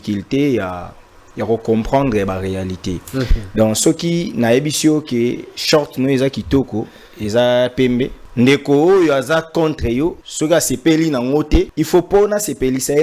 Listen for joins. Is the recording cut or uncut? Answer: cut